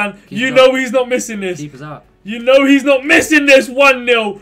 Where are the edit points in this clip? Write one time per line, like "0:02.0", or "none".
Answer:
none